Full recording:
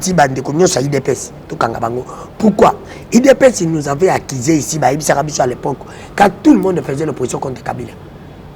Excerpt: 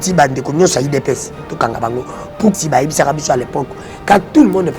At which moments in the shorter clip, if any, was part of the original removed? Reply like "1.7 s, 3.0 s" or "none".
2.5 s